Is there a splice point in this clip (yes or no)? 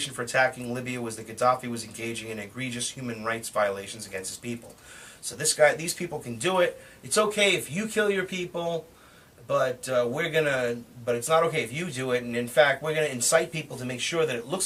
no